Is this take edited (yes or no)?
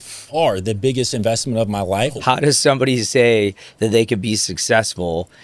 yes